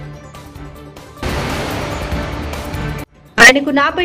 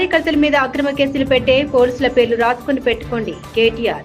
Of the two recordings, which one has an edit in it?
first; 2 cuts; at 1.2 s, 3.2 s

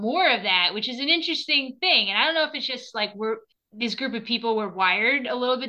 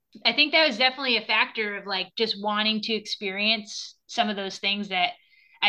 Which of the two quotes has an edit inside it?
first; 1 cut; at 3.6 s

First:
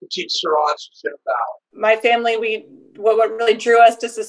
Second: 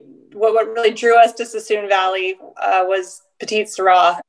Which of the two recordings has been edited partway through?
first; 1 cut; at 1.7 s

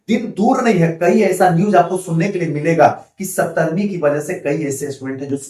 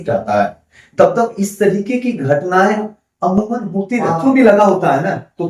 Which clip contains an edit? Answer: second; 1 cut; at 4.1 s

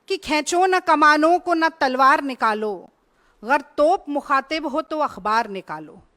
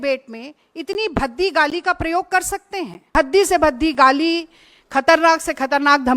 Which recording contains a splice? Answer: second; 1 cut; at 3.1 s

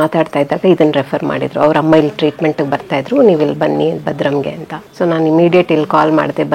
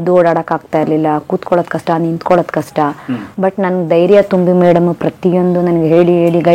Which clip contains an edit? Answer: first; 1 cut; at 4.8 s

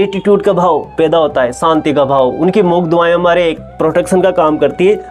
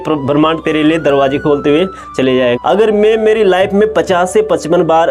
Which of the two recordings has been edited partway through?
second; 1 cut; at 2.6 s

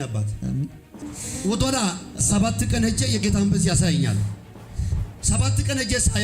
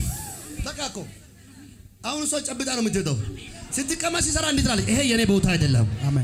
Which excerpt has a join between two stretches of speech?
first; 1 cut; at 1.1 s

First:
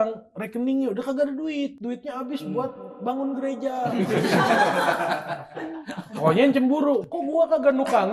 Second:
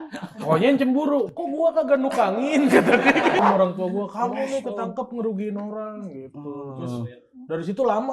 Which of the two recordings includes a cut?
second; 1 cut; at 3.4 s

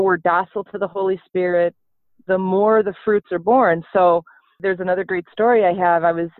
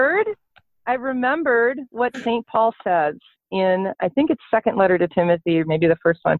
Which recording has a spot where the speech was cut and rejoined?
first; 1 cut; at 4.5 s

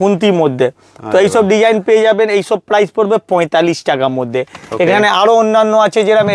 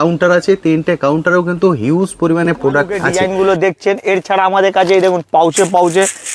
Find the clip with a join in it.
second; 1 cut; at 3.0 s

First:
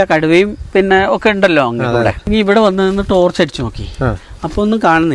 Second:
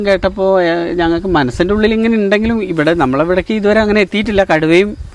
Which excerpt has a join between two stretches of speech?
first; 1 cut; at 2.3 s

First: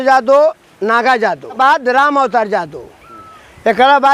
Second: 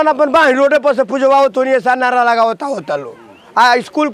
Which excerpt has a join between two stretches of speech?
first; 1 cut; at 1.6 s

